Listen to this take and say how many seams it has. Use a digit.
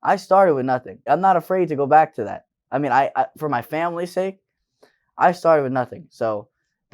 1